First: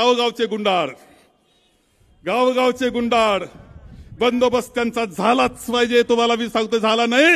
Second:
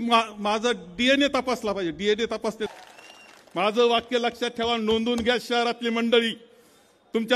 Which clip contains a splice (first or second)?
second